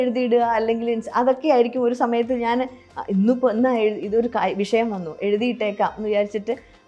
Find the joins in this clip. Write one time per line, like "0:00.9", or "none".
none